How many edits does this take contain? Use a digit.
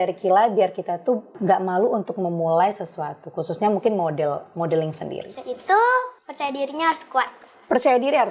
3